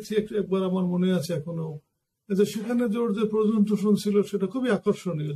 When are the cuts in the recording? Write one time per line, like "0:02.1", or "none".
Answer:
none